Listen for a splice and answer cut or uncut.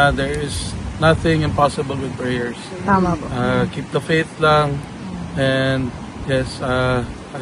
uncut